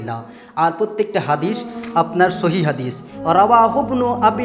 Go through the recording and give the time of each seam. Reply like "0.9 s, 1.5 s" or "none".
3.1 s